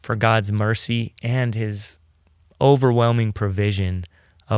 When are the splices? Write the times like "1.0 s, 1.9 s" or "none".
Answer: none